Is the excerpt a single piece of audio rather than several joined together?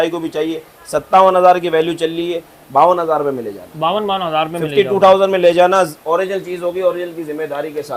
yes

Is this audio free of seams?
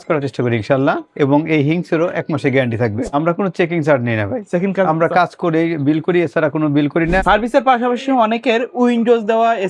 no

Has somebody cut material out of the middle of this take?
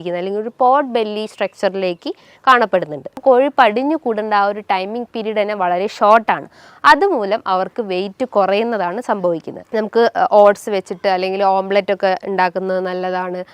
yes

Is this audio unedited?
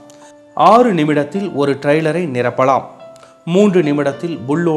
no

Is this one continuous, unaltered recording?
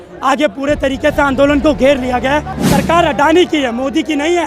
no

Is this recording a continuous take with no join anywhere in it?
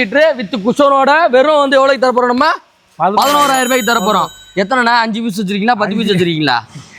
yes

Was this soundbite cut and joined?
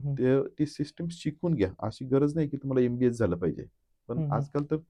no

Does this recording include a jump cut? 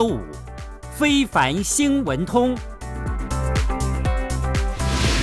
no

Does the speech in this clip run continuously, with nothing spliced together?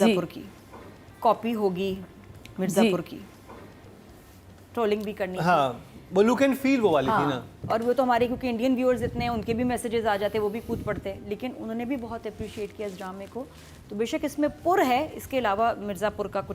yes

